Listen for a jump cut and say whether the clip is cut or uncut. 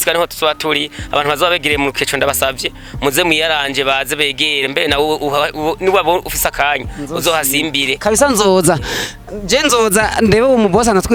uncut